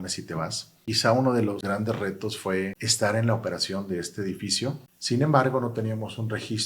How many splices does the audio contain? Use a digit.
4